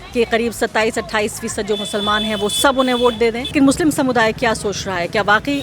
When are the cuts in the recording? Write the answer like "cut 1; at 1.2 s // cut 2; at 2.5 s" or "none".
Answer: cut 1; at 3.5 s